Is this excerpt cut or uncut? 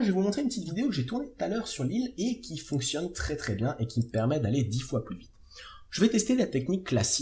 cut